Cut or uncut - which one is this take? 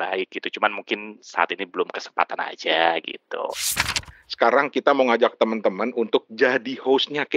cut